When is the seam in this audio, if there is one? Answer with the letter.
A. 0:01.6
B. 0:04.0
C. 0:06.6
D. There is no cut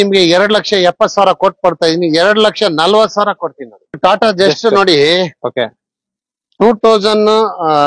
B